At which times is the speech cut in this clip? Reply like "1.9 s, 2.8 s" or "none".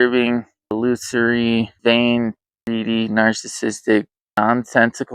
0.7 s, 1.7 s, 2.5 s, 4.4 s